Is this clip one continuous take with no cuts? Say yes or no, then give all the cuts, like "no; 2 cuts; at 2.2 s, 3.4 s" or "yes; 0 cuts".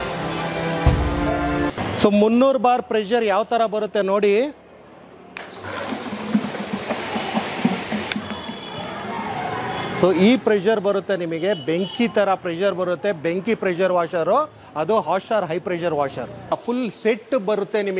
no; 2 cuts; at 1.8 s, 16.5 s